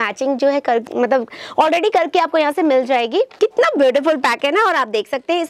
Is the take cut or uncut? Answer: cut